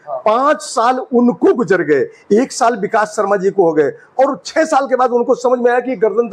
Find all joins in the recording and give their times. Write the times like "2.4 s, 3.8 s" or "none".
none